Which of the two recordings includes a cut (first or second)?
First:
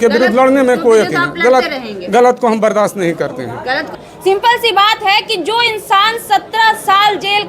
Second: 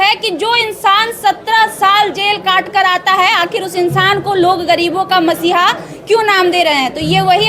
first